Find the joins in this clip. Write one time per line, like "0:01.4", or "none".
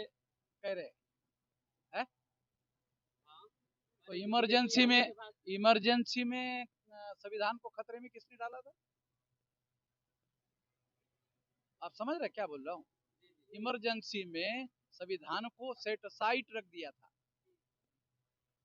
none